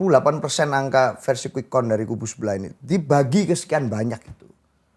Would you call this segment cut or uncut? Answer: uncut